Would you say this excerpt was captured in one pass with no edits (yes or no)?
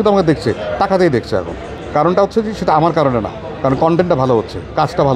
yes